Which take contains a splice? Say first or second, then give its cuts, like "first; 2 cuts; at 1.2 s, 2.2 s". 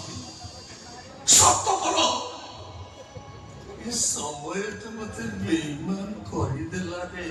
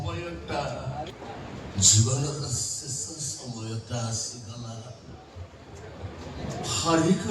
second; 1 cut; at 1.1 s